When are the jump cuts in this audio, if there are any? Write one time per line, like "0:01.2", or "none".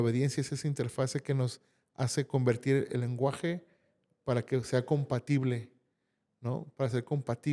none